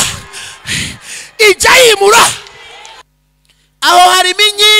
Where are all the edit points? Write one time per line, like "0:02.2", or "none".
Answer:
0:03.0